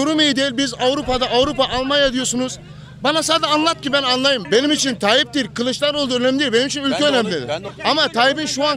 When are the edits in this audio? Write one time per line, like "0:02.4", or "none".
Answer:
0:04.4
0:07.6